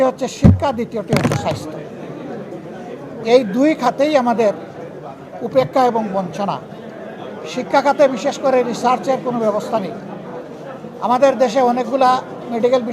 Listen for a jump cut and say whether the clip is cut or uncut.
uncut